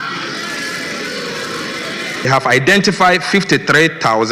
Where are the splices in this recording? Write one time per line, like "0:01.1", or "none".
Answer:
0:02.2